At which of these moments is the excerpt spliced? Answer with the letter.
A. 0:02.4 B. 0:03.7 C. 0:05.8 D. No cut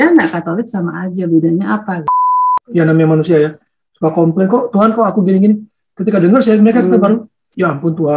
A